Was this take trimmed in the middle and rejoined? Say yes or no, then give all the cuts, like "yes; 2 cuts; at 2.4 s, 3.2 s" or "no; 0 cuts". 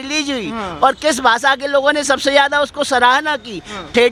no; 0 cuts